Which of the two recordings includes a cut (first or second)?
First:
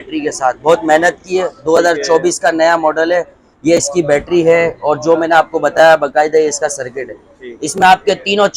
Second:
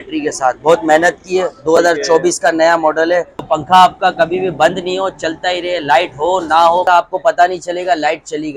second